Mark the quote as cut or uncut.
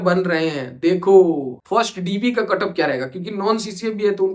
cut